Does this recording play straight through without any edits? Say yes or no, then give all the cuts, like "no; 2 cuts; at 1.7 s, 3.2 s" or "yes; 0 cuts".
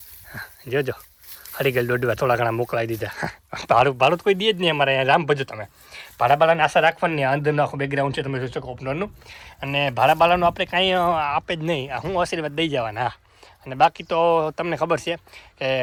yes; 0 cuts